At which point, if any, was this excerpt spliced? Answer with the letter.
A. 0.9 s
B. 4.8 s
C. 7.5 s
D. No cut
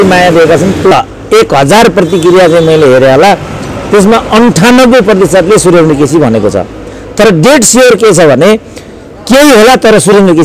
A